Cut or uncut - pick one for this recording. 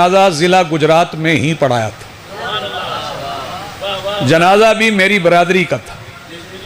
uncut